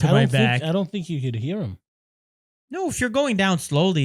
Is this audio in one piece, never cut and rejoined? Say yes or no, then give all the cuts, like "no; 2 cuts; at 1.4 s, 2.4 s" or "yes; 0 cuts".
yes; 0 cuts